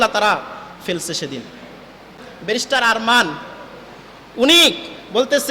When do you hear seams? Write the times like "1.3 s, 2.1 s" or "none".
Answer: 2.3 s